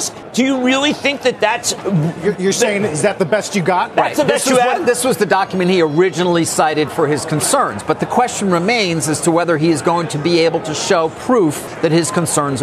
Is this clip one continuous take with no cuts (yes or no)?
yes